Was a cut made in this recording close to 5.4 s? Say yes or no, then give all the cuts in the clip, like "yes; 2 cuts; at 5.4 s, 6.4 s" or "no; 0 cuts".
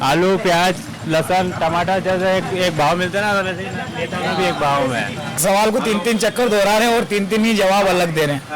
yes; 1 cut; at 5.4 s